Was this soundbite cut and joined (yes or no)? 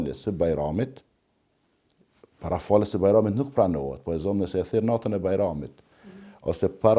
no